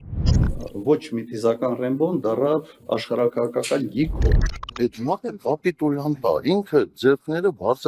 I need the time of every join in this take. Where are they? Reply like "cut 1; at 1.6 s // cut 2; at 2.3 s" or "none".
none